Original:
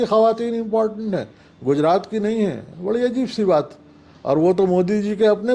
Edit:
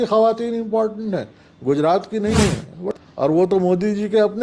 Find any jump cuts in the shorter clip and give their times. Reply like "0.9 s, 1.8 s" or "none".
2.8 s